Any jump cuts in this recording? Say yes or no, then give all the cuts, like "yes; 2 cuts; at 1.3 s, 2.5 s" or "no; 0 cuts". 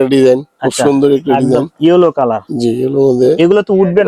no; 0 cuts